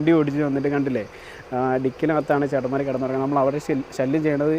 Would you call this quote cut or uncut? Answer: uncut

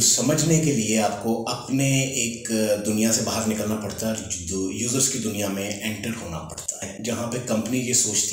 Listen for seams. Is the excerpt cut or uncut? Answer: cut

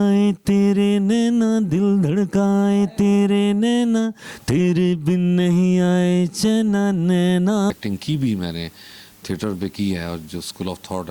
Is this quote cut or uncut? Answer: cut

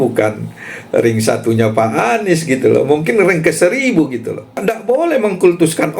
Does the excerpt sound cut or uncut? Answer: cut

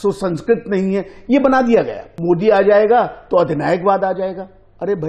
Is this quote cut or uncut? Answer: cut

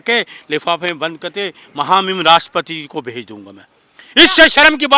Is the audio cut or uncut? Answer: uncut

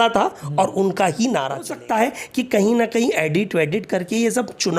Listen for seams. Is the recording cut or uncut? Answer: cut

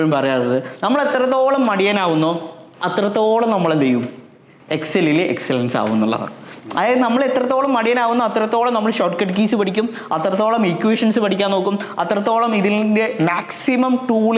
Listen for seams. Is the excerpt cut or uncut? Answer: uncut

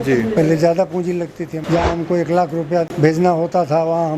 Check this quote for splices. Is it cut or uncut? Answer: cut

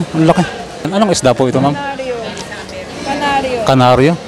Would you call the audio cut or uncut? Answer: cut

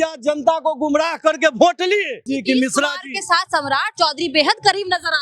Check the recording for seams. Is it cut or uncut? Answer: cut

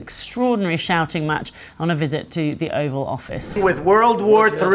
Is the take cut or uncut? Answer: cut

